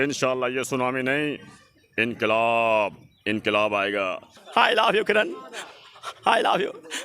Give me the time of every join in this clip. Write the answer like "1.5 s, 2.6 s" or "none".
4.3 s